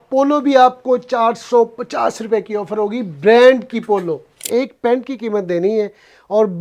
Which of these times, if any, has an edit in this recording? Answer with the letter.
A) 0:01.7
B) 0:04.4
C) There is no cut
B